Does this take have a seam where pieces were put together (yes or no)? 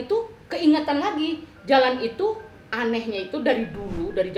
no